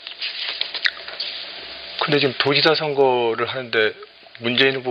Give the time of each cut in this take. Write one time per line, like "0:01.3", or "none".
0:02.1